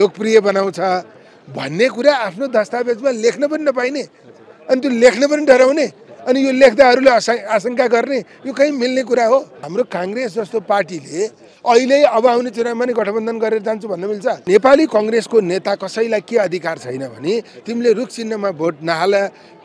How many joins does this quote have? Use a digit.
2